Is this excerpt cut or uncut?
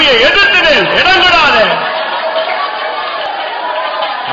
cut